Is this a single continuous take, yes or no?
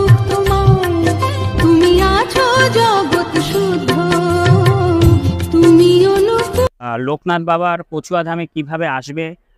no